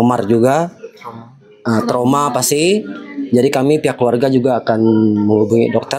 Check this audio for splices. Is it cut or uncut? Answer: uncut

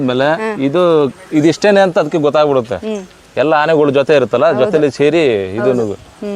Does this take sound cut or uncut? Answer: uncut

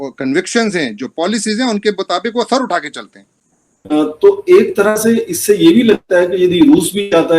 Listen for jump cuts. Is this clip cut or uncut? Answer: cut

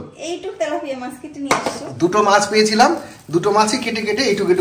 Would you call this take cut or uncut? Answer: uncut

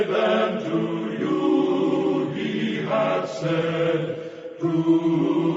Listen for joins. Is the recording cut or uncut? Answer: cut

